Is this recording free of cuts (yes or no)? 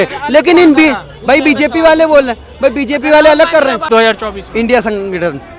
no